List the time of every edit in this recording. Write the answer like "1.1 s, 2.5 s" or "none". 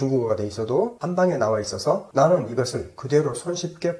1.0 s